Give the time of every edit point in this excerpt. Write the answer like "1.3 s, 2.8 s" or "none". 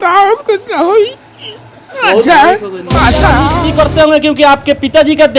3.4 s

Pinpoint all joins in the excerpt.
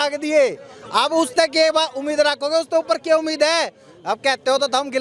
none

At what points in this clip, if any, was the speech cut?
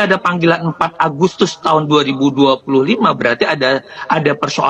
none

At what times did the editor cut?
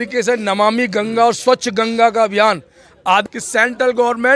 3.2 s

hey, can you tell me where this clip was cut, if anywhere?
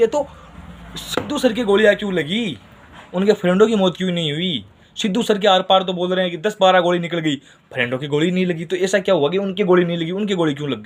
none

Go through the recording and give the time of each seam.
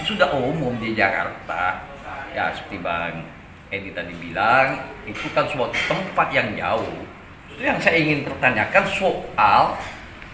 7.5 s

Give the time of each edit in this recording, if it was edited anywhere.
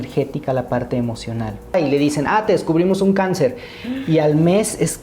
1.7 s

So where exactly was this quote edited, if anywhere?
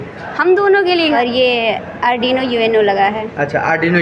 1.2 s

